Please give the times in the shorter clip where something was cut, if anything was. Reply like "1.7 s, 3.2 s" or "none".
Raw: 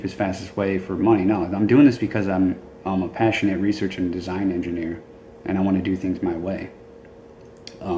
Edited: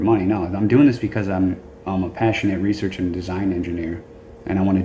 none